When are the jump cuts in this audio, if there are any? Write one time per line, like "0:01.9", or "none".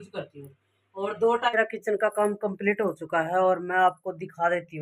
0:01.5